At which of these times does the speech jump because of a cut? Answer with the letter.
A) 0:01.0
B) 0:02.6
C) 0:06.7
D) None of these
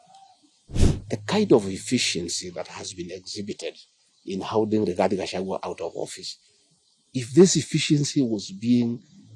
A